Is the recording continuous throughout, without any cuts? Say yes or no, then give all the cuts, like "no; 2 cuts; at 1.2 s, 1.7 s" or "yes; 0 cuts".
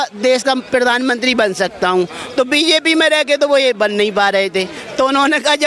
yes; 0 cuts